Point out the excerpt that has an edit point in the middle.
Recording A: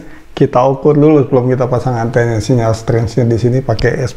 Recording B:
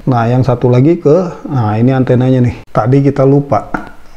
B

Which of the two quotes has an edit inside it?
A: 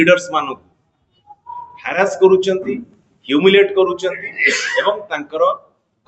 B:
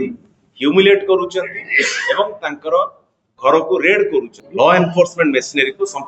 B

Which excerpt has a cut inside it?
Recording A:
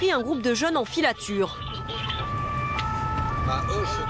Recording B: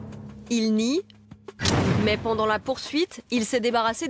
B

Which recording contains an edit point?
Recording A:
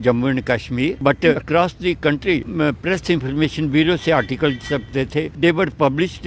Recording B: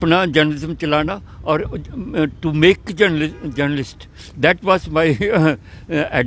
A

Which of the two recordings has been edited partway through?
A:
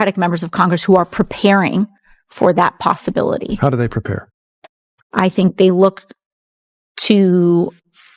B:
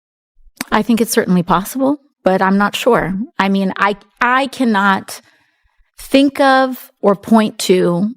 A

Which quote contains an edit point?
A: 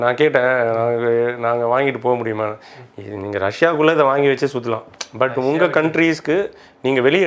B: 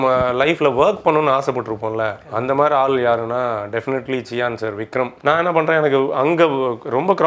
B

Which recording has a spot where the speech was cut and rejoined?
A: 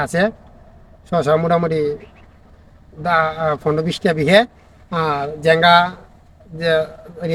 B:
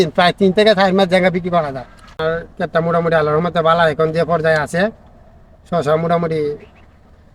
B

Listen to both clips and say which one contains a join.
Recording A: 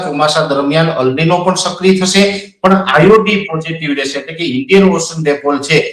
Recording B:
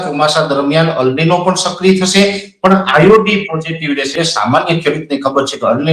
B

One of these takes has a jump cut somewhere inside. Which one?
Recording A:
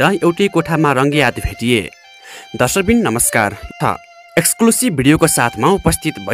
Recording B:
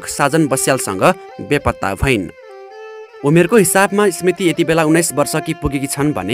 A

